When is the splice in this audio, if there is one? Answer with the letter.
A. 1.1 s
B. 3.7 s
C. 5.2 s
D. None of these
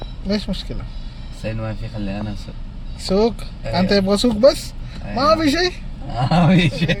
D